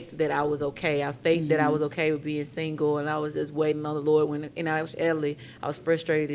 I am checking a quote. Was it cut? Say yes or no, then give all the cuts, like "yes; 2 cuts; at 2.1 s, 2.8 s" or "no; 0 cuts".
no; 0 cuts